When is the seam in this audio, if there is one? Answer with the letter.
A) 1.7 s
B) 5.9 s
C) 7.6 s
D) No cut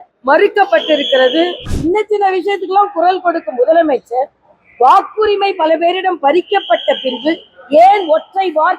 A